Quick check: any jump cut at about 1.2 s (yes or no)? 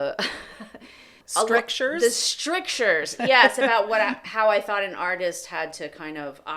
yes